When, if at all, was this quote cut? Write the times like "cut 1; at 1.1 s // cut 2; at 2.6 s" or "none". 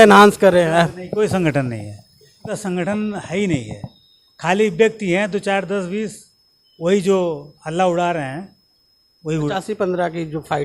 cut 1; at 2.6 s // cut 2; at 9.5 s